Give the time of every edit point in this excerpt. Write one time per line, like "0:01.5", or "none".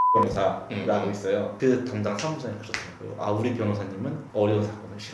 0:01.5
0:04.2

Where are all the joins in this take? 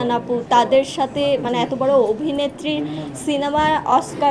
none

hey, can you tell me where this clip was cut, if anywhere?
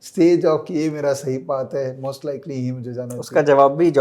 none

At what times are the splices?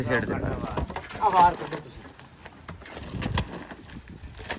none

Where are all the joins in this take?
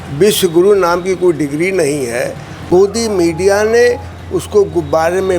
0:02.5

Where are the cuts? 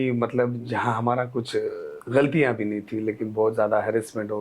0:01.9

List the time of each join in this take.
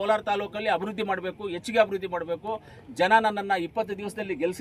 none

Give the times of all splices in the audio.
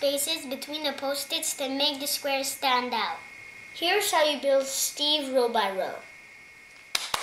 none

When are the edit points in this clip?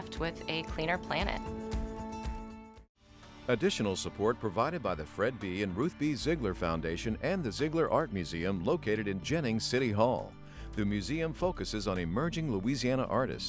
0:03.3

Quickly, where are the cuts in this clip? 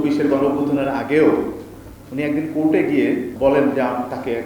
0:03.3

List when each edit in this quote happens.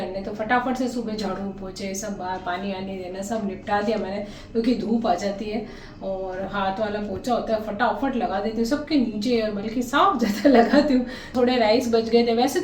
0:11.3

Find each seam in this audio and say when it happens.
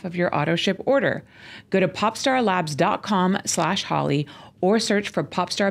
none

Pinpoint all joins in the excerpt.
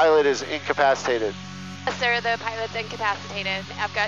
none

